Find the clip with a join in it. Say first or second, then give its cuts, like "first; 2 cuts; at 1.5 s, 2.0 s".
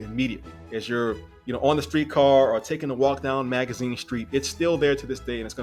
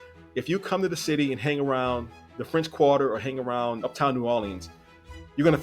second; 1 cut; at 3.8 s